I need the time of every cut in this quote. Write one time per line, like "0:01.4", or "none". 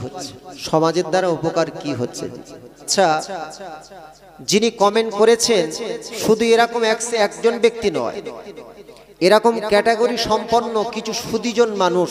0:02.9